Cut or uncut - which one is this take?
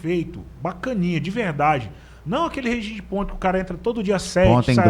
uncut